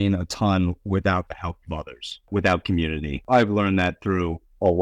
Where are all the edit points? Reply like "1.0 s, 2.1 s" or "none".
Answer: 2.3 s, 3.2 s